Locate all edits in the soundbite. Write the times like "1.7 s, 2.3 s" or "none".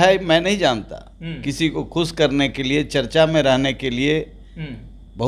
none

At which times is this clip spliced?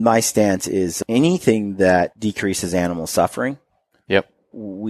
0.9 s, 2.2 s

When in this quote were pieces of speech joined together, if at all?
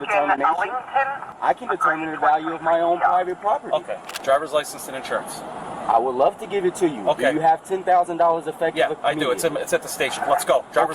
1.4 s, 4.1 s

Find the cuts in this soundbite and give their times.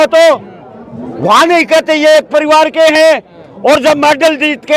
none

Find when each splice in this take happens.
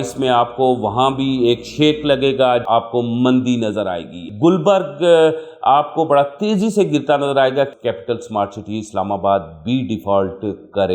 2.7 s, 4.3 s, 7.8 s

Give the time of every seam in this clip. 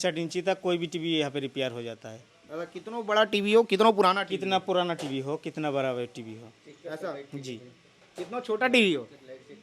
none

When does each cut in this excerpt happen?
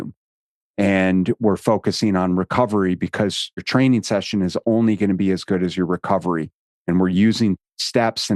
3.6 s

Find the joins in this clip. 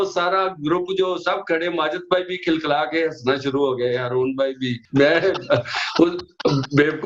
4.7 s

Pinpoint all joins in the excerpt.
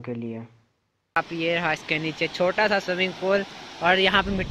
1.2 s

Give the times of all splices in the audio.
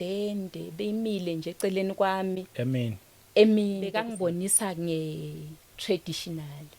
4.1 s

